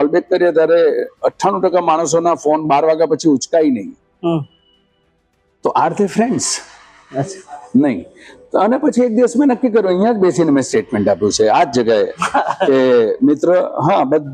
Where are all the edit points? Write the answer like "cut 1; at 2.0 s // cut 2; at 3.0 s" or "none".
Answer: none